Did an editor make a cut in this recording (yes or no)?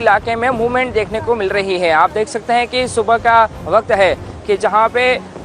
yes